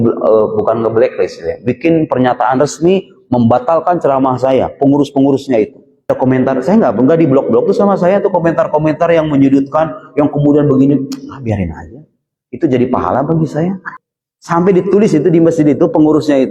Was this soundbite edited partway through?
yes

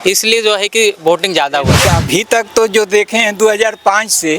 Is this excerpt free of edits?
no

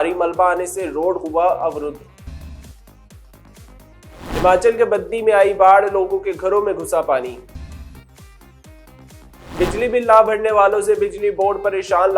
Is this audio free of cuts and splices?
no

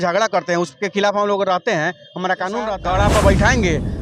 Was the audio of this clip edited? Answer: yes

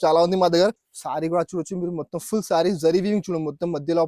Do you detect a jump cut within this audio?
yes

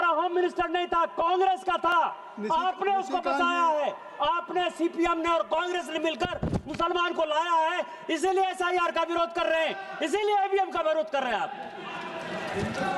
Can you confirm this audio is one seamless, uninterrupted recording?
yes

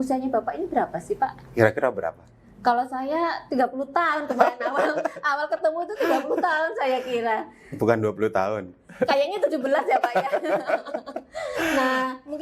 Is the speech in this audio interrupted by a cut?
no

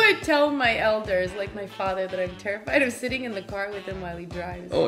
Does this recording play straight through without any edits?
yes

